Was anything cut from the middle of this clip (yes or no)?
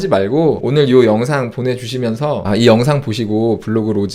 no